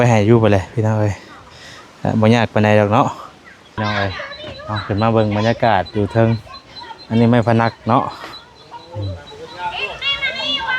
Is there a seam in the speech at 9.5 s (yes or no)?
no